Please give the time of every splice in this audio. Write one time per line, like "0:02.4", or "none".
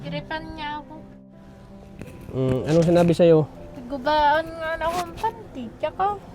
0:01.3